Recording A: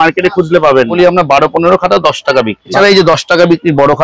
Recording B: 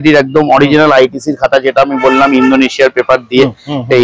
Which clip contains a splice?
A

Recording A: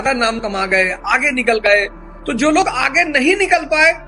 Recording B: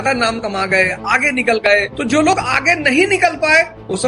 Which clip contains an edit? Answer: B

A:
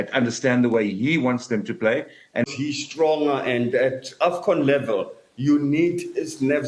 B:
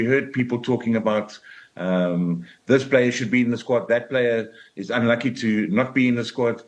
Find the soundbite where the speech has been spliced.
A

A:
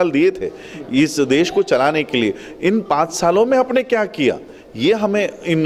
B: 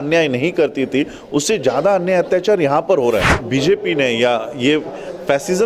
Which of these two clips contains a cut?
B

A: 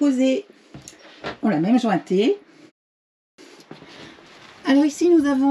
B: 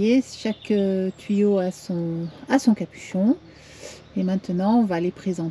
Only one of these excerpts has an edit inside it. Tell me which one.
A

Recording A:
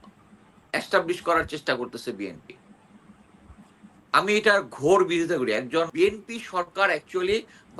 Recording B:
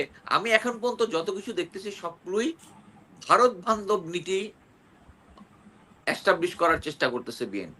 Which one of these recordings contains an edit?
A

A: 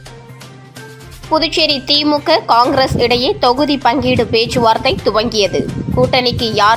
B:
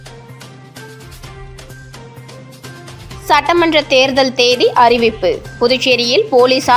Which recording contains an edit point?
A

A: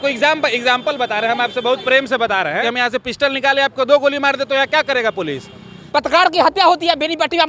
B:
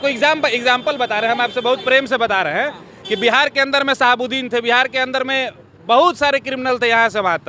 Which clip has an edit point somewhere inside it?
A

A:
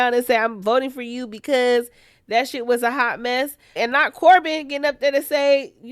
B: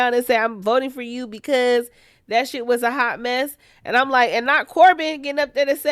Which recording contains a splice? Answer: A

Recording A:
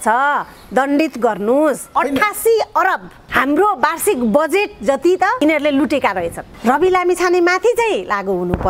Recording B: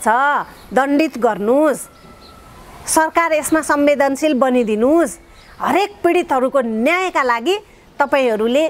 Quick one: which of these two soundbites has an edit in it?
A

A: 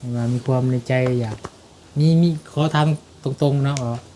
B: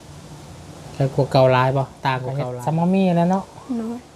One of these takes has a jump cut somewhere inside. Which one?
B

